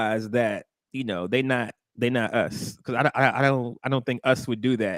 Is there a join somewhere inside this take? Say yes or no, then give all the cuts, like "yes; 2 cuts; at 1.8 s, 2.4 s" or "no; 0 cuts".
no; 0 cuts